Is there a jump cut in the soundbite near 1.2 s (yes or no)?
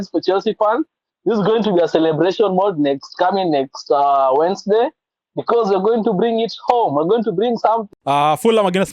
no